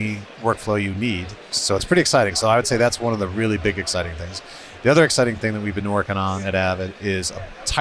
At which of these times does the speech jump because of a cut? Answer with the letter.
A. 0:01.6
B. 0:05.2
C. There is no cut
A